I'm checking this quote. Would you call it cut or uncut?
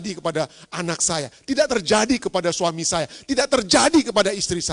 uncut